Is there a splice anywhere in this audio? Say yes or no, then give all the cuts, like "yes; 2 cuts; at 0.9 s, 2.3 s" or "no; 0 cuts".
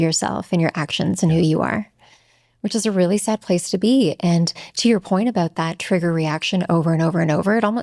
no; 0 cuts